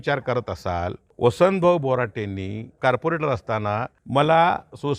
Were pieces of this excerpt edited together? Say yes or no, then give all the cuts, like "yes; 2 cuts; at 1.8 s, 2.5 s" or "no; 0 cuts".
yes; 3 cuts; at 1.0 s, 2.8 s, 4.0 s